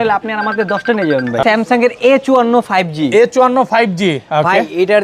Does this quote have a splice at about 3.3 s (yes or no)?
no